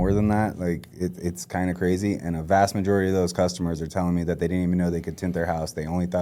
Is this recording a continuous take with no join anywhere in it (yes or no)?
yes